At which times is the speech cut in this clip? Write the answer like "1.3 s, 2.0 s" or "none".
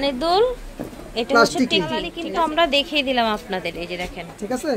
2.1 s